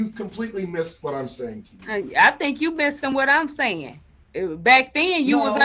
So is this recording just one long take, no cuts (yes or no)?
yes